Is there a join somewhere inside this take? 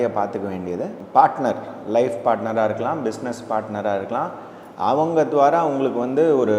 yes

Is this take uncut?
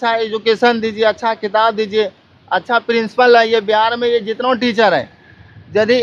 yes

